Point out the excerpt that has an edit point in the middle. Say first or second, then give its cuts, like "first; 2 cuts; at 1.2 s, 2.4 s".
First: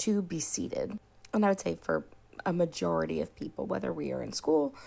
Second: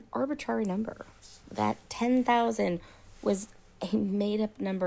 second; 1 cut; at 1.9 s